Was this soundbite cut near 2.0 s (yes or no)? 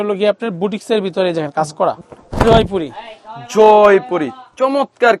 yes